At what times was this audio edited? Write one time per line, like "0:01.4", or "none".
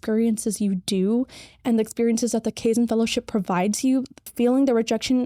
0:04.3